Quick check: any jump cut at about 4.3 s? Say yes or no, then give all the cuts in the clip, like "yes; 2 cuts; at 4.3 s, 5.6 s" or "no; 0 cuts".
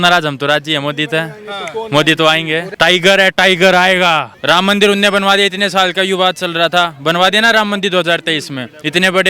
yes; 2 cuts; at 2.7 s, 4.3 s